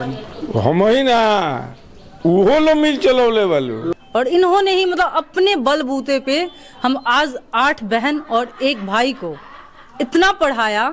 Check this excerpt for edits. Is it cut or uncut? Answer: cut